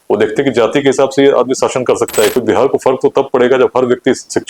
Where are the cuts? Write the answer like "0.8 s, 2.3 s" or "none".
2.4 s